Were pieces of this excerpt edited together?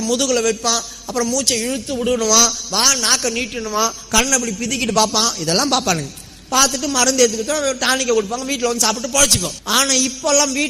yes; 1 cut; at 9.6 s

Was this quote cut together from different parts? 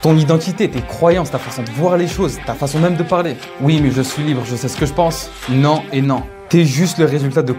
yes; 1 cut; at 3.4 s

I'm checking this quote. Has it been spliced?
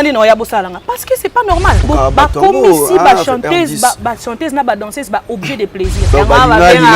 yes; 2 cuts; at 1.8 s, 6.0 s

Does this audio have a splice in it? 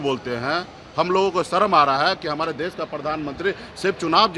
no; 0 cuts

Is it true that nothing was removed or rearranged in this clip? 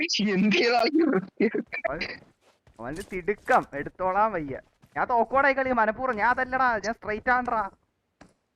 yes; 0 cuts

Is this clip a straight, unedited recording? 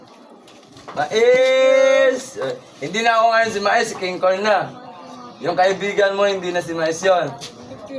yes; 0 cuts

